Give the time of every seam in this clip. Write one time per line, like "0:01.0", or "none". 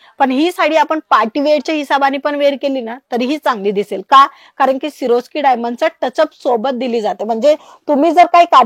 none

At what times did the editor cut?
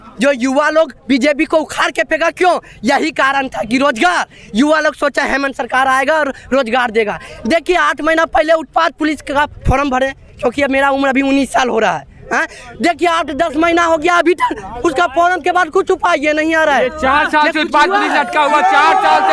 none

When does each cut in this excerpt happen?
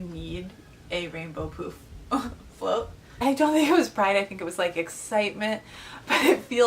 0:03.2

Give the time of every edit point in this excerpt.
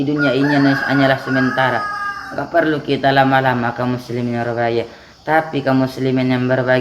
none

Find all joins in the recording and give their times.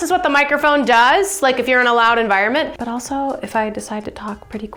none

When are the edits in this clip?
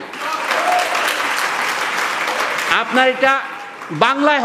none

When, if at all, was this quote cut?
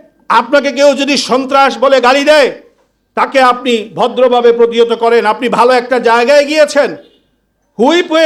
none

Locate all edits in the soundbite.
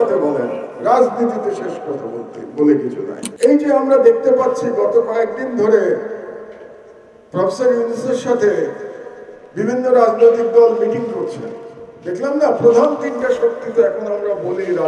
0:03.2

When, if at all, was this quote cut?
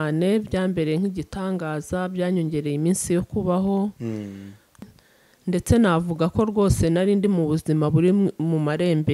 0:04.8

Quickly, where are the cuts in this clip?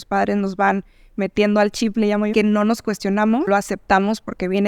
0:02.3
0:03.5

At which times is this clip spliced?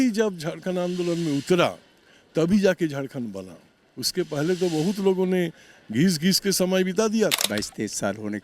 0:07.4

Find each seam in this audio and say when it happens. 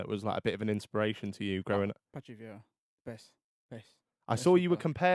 none

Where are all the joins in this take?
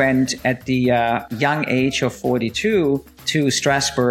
0:01.3
0:03.2

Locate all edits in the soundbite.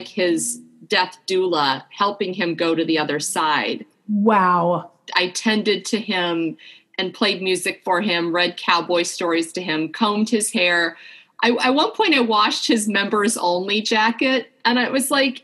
none

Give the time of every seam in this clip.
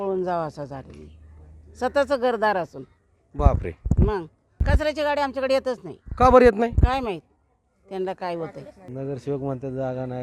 0:04.6
0:08.8

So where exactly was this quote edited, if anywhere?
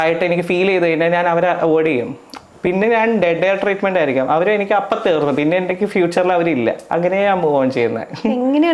none

